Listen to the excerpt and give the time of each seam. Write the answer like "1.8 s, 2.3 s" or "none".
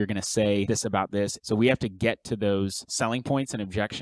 1.4 s